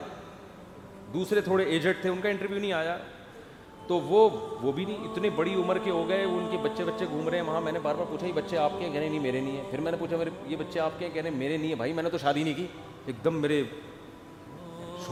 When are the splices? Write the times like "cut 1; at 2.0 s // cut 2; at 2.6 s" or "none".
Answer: none

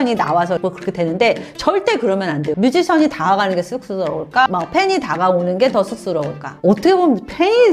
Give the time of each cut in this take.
cut 1; at 2.5 s // cut 2; at 6.5 s

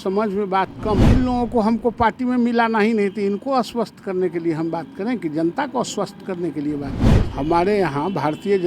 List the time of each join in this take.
cut 1; at 1.0 s // cut 2; at 7.1 s

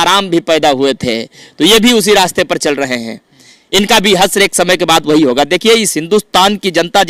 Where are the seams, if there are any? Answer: none

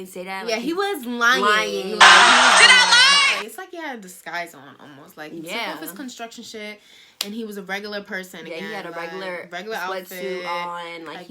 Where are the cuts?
cut 1; at 3.4 s

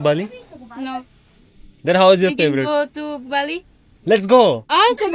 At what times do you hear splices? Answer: none

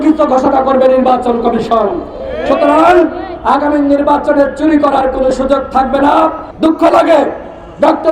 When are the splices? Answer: cut 1; at 6.4 s

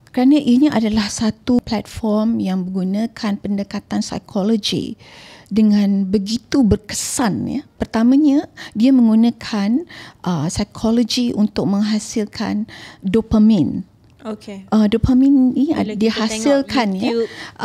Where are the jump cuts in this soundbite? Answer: cut 1; at 1.6 s // cut 2; at 7.8 s

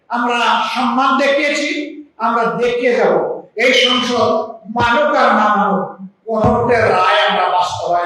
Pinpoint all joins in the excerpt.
none

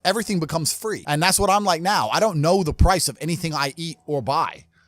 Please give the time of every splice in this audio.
cut 1; at 1.0 s

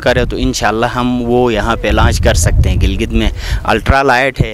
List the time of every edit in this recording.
none

